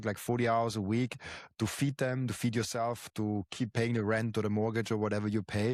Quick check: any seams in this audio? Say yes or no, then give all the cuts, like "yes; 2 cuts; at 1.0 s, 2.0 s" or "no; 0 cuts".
no; 0 cuts